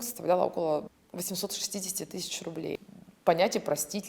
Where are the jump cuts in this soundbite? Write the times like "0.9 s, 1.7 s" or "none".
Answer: 1.0 s, 2.8 s